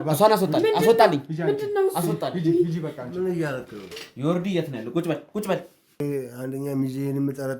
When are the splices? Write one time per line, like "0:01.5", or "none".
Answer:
0:06.0